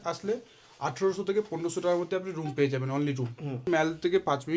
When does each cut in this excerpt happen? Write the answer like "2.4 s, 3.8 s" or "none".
3.7 s